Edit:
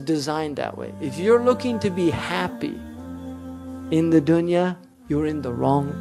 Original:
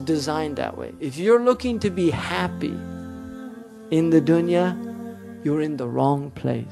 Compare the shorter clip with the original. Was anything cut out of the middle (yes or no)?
yes